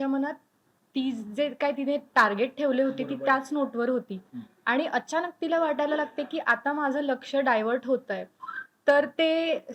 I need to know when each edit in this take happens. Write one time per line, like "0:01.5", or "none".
none